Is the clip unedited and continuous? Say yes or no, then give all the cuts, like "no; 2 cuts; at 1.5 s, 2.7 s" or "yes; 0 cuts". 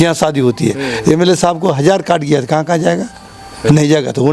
yes; 0 cuts